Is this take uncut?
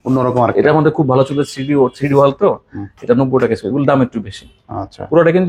yes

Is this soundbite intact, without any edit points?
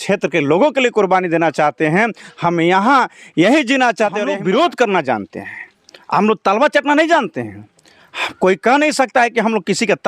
no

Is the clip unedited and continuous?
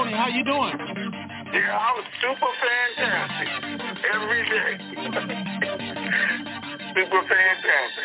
yes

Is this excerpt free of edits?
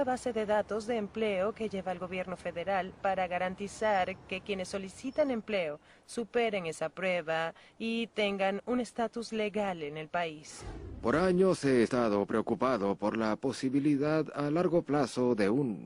yes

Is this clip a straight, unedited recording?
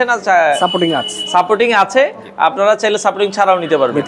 yes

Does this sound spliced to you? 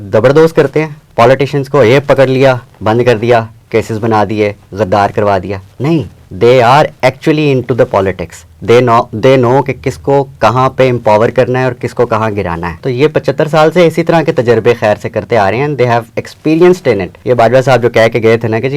yes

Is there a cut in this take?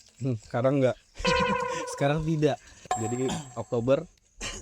yes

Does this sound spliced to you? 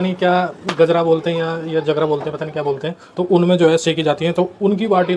no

